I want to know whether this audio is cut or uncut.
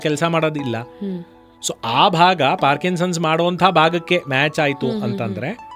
uncut